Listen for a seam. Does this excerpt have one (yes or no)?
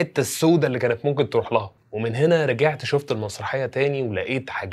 yes